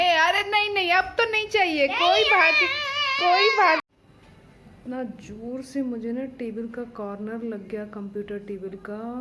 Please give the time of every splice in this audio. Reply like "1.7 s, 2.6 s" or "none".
4.0 s